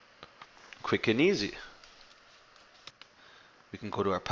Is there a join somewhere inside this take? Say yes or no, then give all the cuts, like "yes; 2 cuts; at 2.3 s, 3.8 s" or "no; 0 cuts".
yes; 1 cut; at 2.9 s